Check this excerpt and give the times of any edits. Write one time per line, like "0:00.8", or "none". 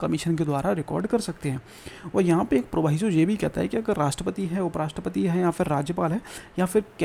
none